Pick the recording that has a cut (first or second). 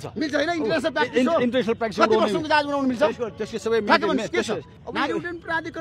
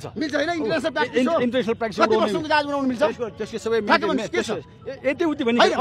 first